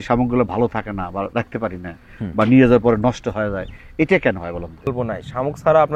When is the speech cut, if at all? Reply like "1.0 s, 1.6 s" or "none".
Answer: 4.9 s